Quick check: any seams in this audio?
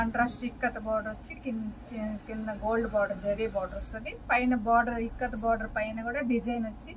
no; 0 cuts

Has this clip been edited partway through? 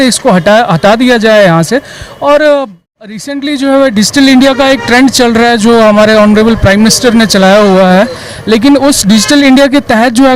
yes; 1 cut; at 3.3 s

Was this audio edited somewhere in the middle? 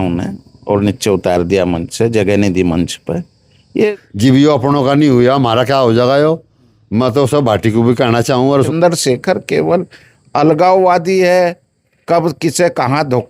yes; 2 cuts; at 3.9 s, 8.7 s

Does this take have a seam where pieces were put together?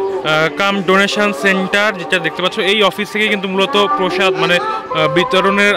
no; 0 cuts

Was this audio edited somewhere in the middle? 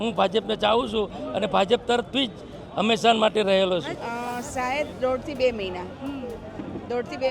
yes; 1 cut; at 3.9 s

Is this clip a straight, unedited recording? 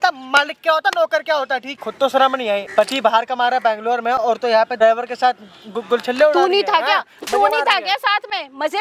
no; 3 cuts; at 1.8 s, 2.7 s, 4.8 s

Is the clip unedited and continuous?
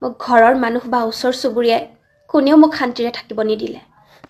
yes; 0 cuts

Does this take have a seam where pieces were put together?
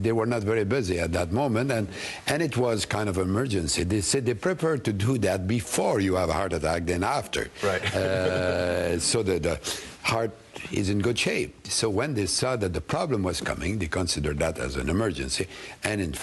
yes; 1 cut; at 6.2 s

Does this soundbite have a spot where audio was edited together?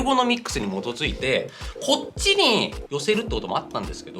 no; 0 cuts

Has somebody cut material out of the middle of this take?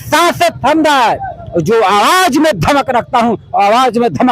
no; 0 cuts

